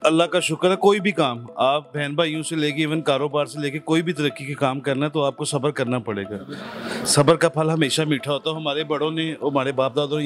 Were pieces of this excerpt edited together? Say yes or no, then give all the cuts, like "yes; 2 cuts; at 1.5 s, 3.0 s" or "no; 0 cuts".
no; 0 cuts